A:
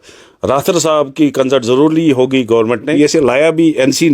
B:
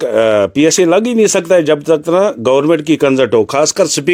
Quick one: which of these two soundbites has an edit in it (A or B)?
A